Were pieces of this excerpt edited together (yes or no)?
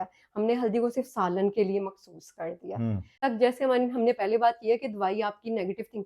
yes